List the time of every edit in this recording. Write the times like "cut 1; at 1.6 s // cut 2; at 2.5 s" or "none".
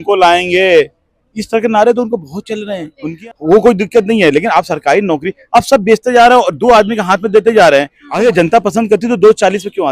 cut 1; at 3.0 s // cut 2; at 8.0 s